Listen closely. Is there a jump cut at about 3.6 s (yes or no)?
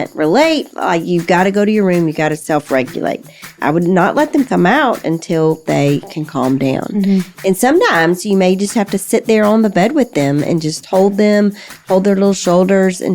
yes